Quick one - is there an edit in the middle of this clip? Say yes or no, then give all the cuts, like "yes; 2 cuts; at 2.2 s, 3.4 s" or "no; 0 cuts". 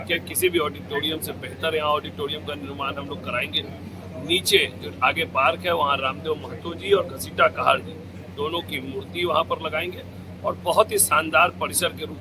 no; 0 cuts